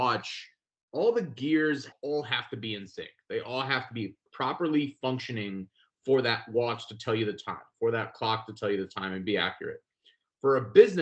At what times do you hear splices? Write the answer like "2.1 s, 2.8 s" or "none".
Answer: 1.9 s, 4.3 s